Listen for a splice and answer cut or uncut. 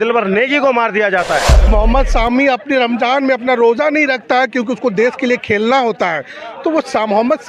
cut